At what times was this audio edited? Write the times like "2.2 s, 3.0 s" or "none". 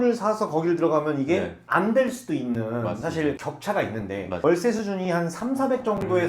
4.4 s